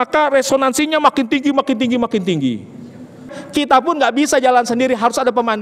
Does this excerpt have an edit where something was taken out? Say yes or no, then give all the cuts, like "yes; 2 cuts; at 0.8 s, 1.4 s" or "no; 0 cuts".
yes; 1 cut; at 3.3 s